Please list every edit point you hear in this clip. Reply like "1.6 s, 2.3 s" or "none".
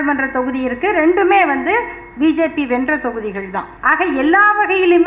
3.7 s